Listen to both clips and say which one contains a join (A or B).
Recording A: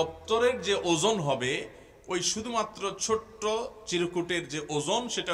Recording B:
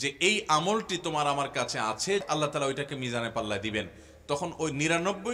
B